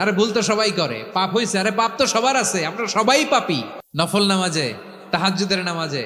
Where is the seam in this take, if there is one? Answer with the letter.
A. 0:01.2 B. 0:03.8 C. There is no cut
B